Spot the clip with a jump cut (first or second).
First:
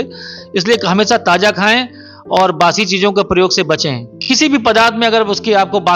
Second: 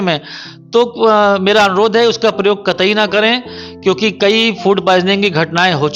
first